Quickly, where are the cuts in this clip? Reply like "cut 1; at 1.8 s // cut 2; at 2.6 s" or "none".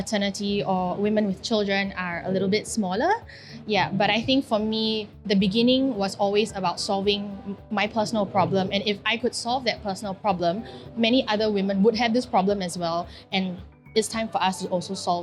none